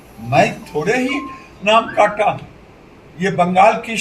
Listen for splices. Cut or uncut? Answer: uncut